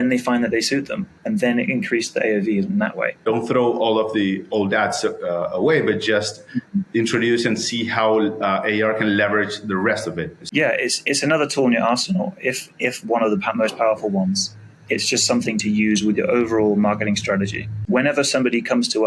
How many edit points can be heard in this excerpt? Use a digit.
3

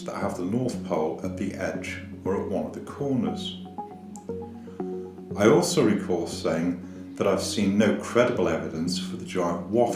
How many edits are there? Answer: 1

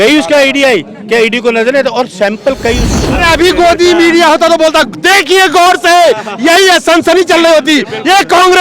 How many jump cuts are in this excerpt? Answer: 1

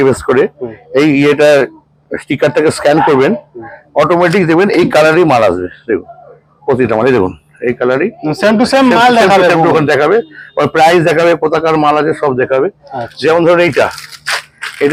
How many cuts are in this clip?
0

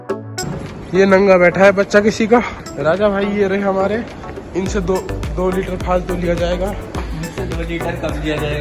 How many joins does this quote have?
1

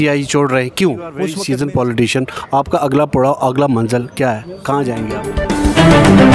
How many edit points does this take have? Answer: 2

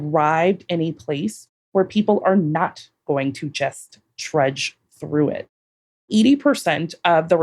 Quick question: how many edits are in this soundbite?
1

